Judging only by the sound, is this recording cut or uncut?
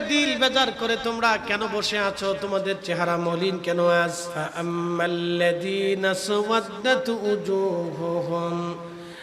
cut